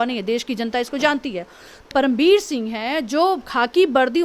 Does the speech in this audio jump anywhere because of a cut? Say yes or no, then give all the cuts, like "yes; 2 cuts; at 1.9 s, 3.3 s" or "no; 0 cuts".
yes; 1 cut; at 1.9 s